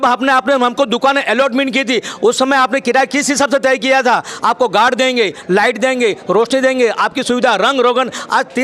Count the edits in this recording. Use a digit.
0